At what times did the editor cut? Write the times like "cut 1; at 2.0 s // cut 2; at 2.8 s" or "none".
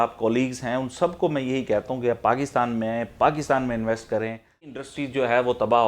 cut 1; at 4.8 s